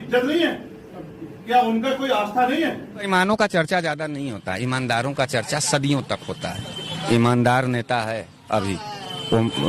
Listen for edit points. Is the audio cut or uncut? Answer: cut